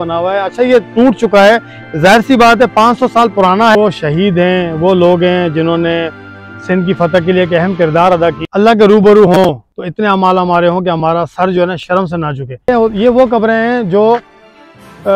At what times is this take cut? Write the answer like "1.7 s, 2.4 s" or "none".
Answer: 3.8 s, 8.4 s, 12.7 s